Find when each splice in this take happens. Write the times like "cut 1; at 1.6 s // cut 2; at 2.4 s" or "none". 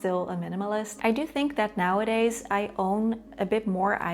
cut 1; at 0.9 s